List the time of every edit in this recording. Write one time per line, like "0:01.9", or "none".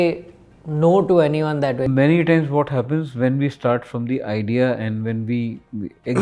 0:01.9

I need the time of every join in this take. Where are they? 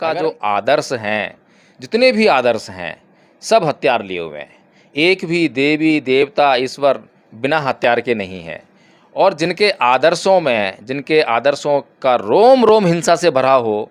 none

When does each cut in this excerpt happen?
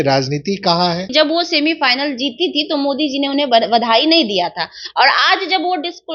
0:01.1

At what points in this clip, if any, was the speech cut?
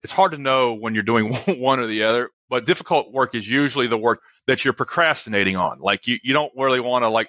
0:02.4
0:04.2

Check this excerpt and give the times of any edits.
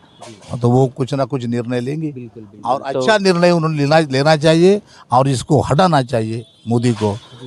none

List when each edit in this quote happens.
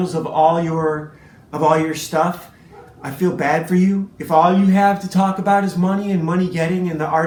none

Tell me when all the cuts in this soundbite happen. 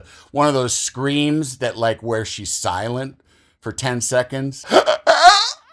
0:04.6

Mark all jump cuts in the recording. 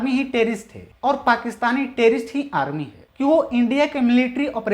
0:03.0

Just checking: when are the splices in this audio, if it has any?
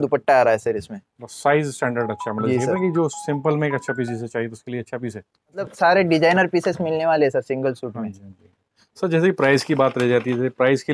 none

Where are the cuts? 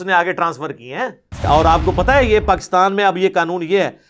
0:01.4

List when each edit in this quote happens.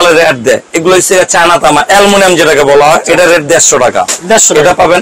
0:03.0

